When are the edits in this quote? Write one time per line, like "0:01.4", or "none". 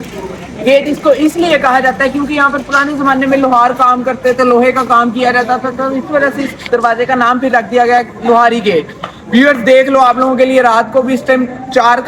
none